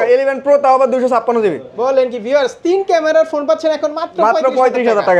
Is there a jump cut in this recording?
no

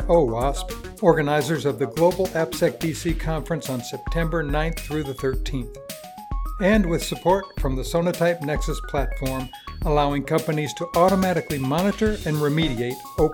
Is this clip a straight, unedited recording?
yes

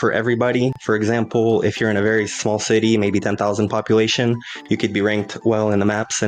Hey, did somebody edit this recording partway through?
no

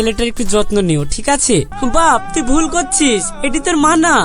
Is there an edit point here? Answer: yes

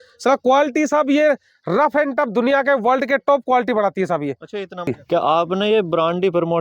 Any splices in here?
yes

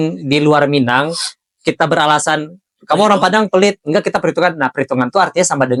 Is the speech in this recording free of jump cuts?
yes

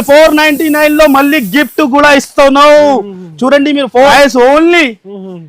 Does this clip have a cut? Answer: yes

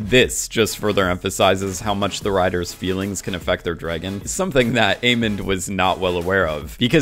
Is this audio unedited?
yes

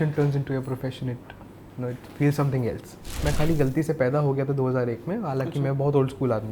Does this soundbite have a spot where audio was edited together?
yes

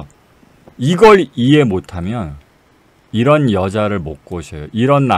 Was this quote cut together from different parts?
no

